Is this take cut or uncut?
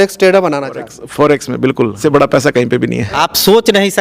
cut